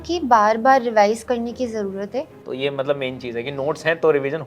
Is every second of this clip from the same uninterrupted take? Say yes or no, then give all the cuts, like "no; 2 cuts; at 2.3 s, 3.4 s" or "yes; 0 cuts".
no; 1 cut; at 2.4 s